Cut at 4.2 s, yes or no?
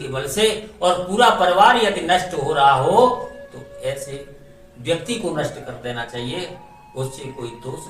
no